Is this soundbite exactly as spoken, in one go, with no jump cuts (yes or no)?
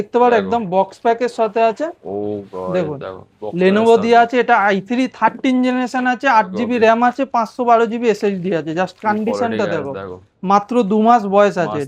yes